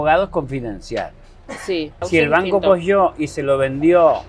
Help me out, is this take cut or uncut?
cut